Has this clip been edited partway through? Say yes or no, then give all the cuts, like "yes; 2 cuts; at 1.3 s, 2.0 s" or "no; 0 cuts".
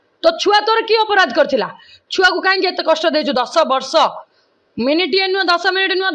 no; 0 cuts